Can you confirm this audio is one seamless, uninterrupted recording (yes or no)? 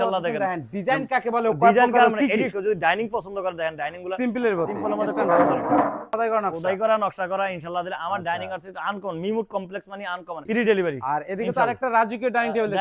no